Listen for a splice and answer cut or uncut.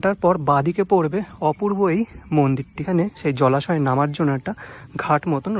cut